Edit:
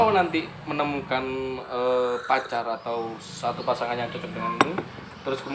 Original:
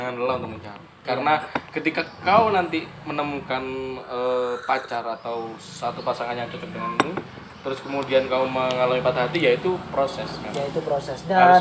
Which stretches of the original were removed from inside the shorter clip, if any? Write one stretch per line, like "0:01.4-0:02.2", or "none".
none